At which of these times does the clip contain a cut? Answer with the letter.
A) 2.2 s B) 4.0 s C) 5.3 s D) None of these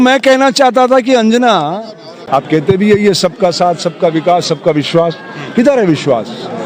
A